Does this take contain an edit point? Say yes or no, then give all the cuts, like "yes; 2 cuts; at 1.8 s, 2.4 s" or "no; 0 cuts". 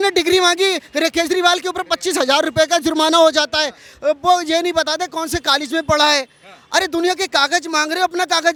no; 0 cuts